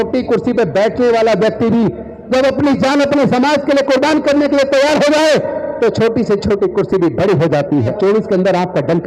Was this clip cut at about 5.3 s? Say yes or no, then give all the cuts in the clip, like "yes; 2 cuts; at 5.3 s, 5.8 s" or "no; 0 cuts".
no; 1 cut; at 7.9 s